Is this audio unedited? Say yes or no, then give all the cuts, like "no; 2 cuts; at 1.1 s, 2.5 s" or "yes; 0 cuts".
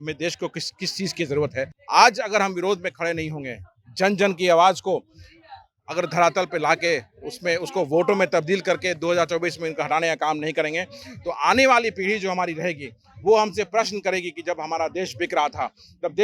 no; 1 cut; at 1.7 s